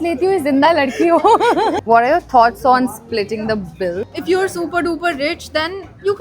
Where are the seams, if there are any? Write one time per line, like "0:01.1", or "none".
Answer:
0:01.8
0:04.1

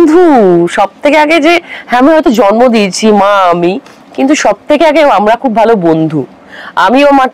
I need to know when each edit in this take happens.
none

